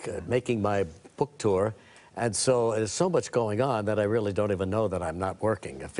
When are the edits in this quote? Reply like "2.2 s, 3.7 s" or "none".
1.3 s